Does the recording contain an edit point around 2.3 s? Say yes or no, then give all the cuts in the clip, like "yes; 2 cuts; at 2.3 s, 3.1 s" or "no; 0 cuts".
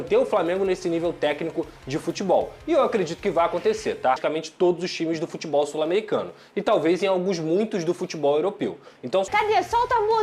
no; 2 cuts; at 4.2 s, 9.3 s